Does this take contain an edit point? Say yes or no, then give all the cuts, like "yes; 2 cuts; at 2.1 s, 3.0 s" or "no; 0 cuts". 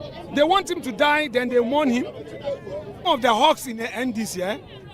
yes; 1 cut; at 3.0 s